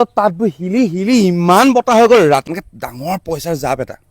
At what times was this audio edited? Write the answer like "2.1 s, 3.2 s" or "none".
2.5 s